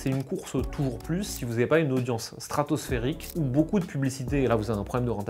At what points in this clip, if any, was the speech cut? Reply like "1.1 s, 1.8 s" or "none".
none